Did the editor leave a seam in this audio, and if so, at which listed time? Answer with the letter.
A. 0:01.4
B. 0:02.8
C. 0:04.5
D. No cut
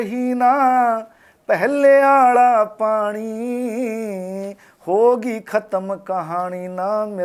D